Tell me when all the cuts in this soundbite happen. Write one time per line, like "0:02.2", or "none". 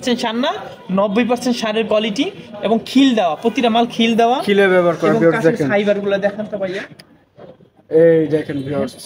none